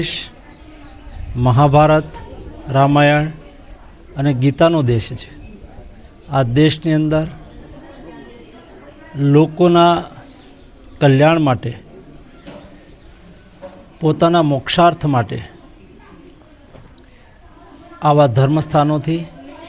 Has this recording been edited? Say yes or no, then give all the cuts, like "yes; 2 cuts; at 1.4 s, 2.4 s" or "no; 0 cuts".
no; 0 cuts